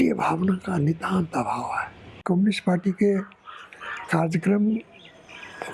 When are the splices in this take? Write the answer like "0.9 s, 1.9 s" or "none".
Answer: 2.2 s